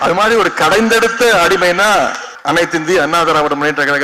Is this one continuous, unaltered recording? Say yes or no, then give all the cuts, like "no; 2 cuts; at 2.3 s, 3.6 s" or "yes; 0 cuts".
no; 1 cut; at 2.3 s